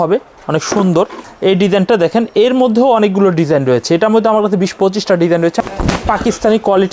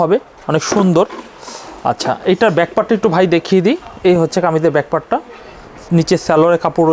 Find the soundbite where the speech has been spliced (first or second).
first